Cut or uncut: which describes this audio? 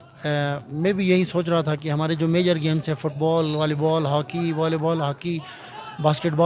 uncut